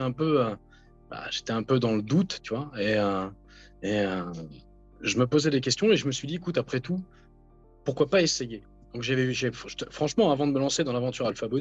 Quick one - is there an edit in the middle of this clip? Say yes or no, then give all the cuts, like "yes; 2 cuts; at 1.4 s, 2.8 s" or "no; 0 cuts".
no; 0 cuts